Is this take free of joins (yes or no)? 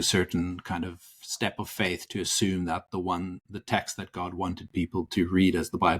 yes